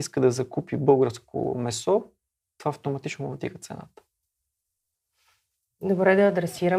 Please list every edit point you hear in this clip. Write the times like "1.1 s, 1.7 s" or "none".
none